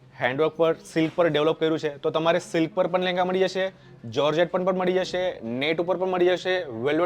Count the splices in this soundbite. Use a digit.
0